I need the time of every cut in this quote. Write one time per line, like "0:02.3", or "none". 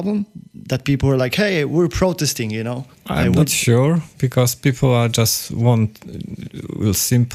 none